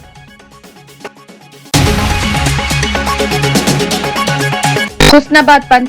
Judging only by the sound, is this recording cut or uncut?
uncut